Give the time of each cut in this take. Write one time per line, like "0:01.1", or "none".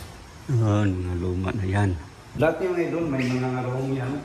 0:02.4